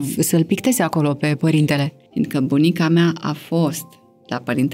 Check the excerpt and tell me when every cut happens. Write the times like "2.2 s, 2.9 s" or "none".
2.0 s